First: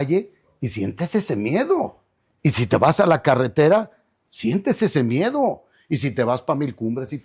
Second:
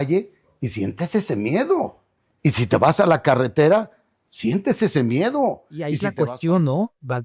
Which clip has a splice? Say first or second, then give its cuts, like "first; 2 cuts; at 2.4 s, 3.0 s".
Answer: second; 1 cut; at 6.1 s